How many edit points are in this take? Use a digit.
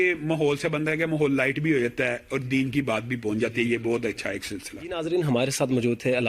0